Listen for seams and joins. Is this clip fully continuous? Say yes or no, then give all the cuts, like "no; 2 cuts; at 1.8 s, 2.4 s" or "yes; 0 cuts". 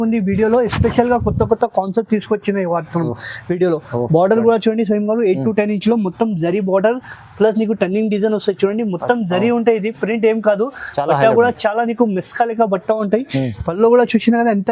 yes; 0 cuts